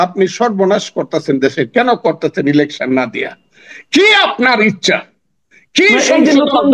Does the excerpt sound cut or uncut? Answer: uncut